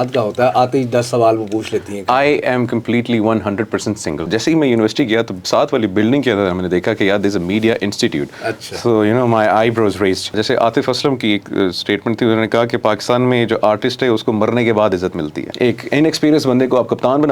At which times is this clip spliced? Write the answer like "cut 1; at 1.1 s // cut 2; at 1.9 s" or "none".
cut 1; at 4.2 s // cut 2; at 10.4 s // cut 3; at 15.4 s